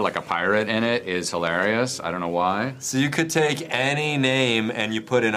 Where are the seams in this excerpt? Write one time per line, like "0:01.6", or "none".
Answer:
none